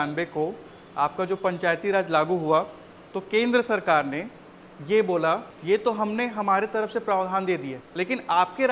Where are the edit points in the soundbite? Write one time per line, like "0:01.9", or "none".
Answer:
0:05.5
0:07.8